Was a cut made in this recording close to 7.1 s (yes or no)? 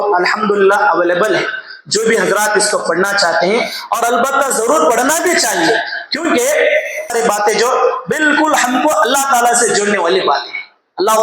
yes